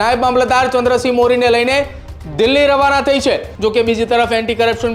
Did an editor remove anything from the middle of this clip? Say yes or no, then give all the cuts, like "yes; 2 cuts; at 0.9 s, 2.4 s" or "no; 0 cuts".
yes; 1 cut; at 3.5 s